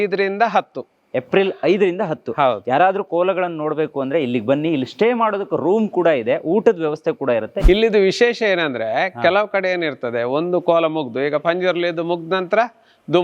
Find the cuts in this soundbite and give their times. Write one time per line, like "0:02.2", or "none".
0:07.5